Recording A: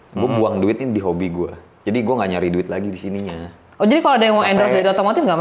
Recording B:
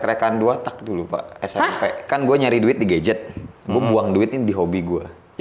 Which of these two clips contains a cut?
B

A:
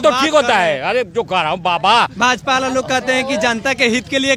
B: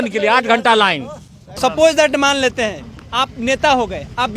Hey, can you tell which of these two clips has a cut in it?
B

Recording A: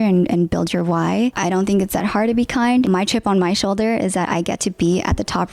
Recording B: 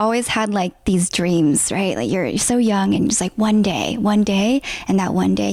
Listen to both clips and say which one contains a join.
A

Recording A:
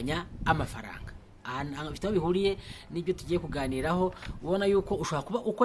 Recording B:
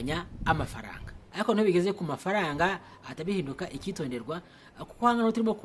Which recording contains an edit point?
B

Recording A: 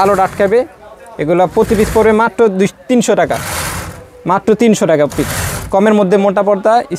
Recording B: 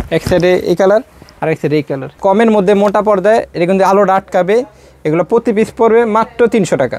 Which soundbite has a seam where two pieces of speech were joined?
B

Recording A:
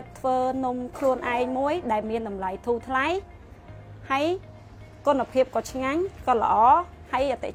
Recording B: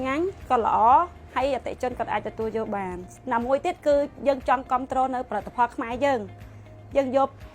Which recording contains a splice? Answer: B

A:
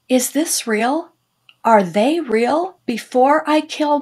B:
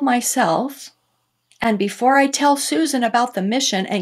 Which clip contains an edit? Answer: A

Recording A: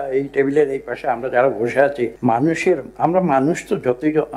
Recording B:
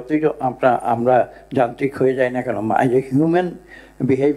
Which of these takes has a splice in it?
A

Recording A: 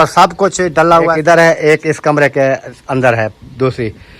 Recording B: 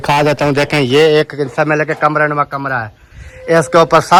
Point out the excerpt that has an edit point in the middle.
A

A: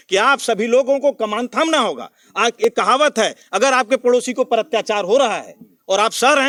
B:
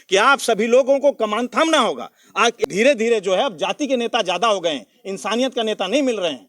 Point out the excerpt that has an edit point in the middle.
B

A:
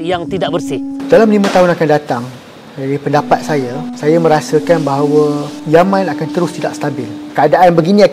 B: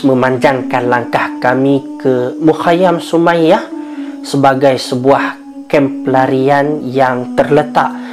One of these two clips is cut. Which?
A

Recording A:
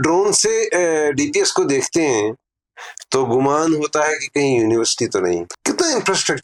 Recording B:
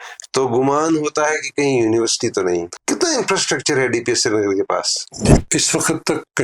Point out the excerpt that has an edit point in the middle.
B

